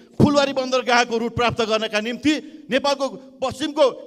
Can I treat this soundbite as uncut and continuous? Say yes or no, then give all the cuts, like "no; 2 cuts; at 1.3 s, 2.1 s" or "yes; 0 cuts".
yes; 0 cuts